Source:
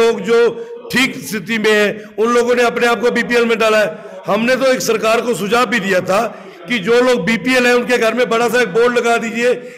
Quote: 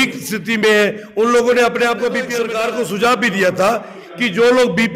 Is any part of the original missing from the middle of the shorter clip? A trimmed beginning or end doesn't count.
yes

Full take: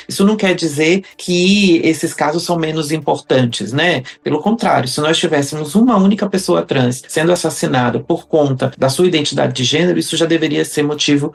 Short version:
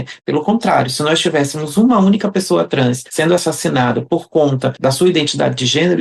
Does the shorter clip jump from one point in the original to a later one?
no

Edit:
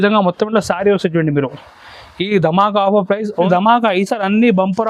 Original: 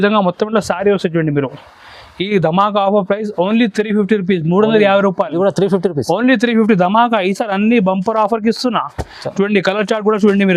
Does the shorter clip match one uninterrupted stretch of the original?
no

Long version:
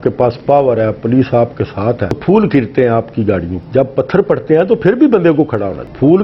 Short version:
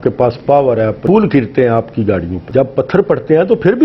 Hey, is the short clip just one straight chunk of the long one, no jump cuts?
no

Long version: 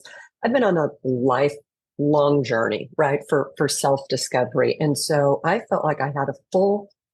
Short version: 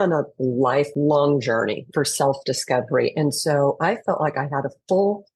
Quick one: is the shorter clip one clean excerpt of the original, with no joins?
no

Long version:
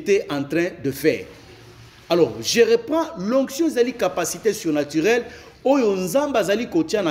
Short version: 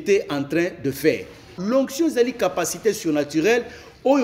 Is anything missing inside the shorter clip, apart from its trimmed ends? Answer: yes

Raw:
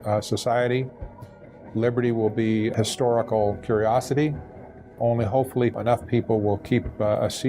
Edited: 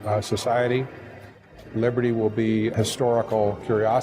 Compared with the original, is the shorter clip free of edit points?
yes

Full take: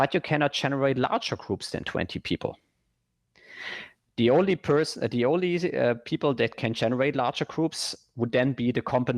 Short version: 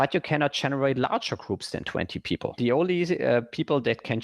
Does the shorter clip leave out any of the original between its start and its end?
yes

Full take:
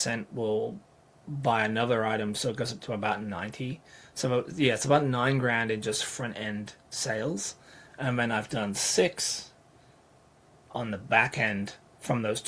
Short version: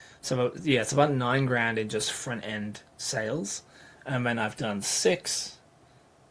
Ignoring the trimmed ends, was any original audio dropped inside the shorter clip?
no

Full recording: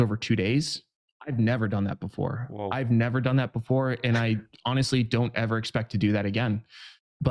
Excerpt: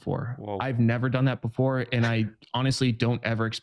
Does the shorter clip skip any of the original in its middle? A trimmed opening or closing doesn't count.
no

